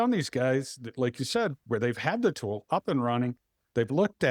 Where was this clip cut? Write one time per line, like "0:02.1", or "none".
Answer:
none